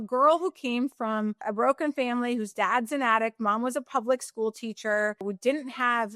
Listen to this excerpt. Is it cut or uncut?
cut